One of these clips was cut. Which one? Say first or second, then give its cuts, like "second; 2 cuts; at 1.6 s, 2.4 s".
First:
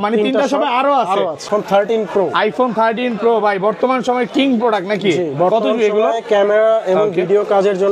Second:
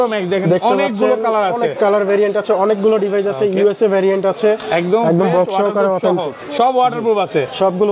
first; 1 cut; at 1.5 s